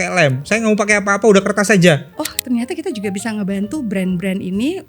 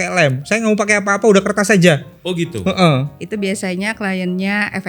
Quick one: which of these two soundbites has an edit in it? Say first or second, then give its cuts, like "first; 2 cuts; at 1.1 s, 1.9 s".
first; 1 cut; at 2.1 s